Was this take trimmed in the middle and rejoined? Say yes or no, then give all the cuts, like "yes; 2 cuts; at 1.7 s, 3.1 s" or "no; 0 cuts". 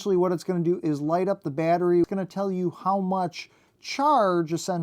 yes; 1 cut; at 2.1 s